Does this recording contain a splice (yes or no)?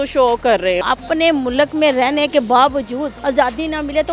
yes